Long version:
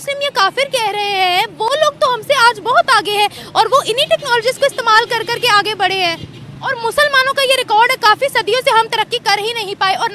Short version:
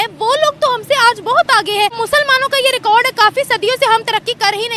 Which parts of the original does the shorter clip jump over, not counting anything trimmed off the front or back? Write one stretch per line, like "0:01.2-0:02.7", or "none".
0:03.3-0:06.8